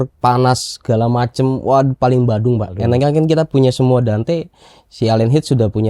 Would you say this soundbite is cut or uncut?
cut